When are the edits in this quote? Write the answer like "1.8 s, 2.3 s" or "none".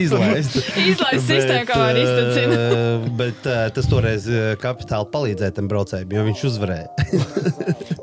none